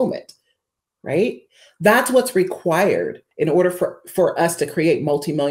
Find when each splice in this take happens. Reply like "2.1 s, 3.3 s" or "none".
3.2 s